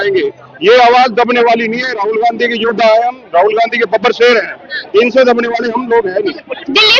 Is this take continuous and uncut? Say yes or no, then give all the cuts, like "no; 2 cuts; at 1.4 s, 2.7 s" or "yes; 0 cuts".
yes; 0 cuts